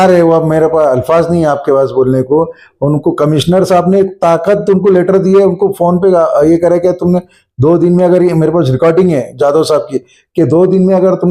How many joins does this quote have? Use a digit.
0